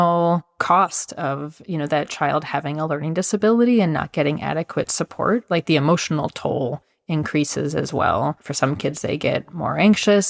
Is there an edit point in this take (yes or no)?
yes